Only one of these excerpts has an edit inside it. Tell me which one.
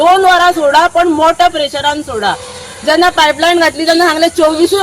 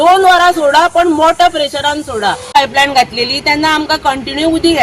second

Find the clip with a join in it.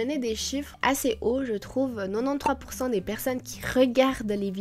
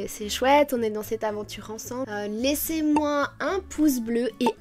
second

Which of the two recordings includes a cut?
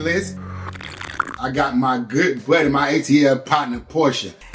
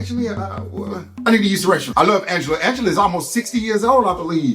second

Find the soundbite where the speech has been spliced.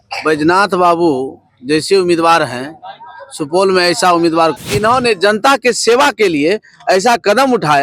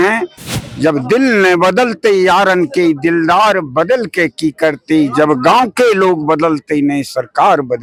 first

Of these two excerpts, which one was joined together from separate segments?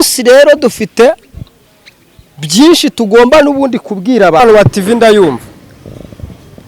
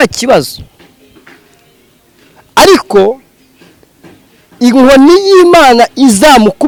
first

